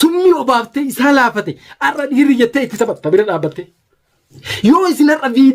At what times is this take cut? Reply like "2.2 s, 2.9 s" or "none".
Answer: 4.1 s